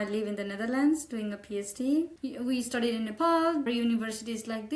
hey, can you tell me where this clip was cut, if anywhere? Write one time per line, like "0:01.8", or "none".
0:02.2
0:03.7